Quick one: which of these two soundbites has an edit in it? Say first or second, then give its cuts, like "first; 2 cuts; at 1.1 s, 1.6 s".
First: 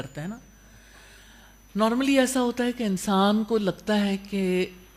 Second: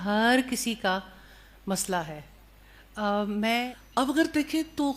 second; 1 cut; at 3.6 s